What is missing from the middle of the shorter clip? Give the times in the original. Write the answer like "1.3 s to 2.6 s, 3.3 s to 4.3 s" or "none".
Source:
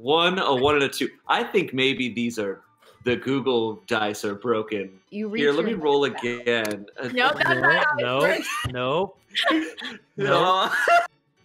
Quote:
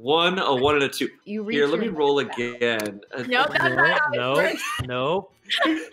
1.1 s to 5.0 s